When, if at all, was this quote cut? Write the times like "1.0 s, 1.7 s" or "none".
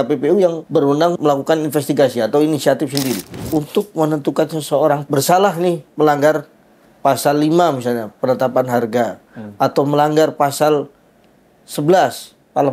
1.1 s, 3.3 s, 5.0 s